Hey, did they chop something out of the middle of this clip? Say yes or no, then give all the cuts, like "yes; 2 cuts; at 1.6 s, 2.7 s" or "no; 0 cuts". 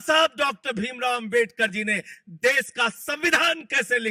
no; 0 cuts